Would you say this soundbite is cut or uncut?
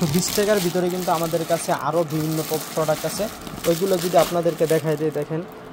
uncut